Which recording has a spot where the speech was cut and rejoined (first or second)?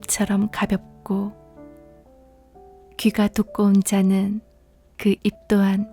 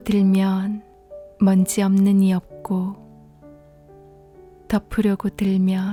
first